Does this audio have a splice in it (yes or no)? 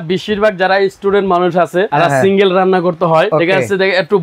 yes